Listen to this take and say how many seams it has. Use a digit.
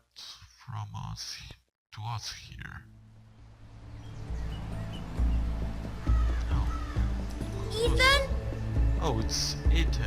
1